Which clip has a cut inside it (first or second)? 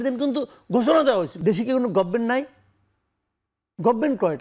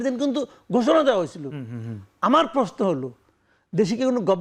first